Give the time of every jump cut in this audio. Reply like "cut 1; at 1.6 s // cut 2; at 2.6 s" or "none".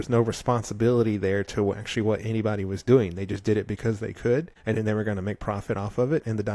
cut 1; at 4.5 s